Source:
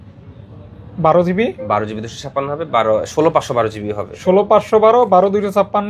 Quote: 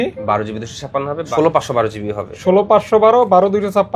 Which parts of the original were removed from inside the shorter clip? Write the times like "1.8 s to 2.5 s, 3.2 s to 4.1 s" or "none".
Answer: 2.7 s to 3.1 s